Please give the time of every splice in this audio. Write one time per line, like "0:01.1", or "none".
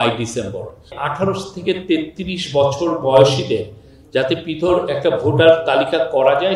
0:00.9

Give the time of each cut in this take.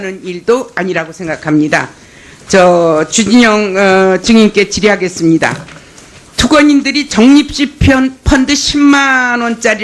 0:01.7

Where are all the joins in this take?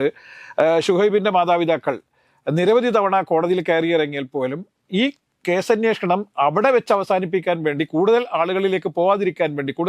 none

